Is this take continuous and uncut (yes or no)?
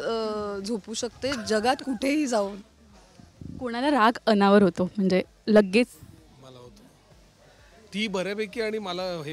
yes